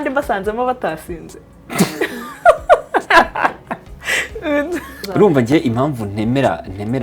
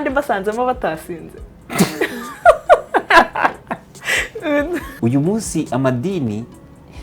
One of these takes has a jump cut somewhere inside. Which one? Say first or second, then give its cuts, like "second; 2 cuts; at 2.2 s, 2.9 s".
second; 1 cut; at 4.9 s